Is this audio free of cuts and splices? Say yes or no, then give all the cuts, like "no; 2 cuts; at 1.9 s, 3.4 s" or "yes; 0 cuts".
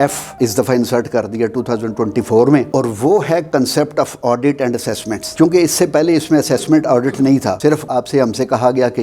yes; 0 cuts